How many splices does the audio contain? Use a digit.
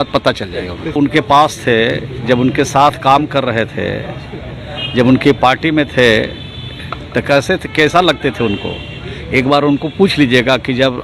1